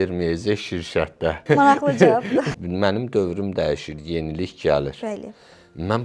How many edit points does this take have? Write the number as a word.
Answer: two